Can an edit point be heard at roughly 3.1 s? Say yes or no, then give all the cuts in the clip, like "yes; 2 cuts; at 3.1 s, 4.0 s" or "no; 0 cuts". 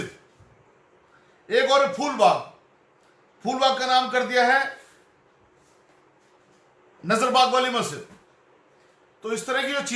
no; 0 cuts